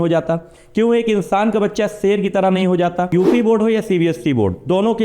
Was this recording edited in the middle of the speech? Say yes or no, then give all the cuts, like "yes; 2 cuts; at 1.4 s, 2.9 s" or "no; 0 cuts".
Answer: yes; 1 cut; at 3.1 s